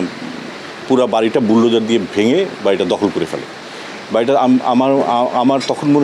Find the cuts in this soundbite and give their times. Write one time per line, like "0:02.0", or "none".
none